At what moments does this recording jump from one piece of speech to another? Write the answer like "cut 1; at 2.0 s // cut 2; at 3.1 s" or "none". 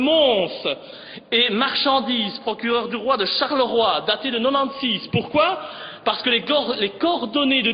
none